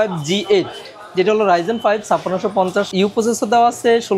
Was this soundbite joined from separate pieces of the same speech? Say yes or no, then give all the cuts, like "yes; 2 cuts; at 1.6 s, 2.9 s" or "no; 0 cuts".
yes; 1 cut; at 2.9 s